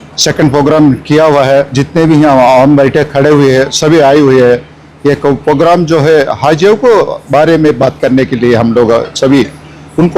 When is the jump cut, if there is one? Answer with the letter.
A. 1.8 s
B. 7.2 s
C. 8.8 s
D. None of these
A